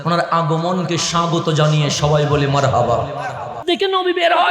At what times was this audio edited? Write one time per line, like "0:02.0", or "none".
0:03.6